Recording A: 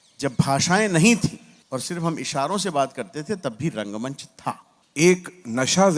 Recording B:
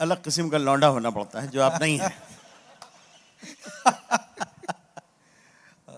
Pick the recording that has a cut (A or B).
A